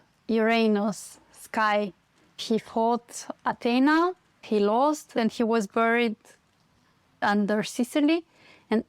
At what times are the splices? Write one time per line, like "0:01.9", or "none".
0:04.3
0:05.1
0:07.2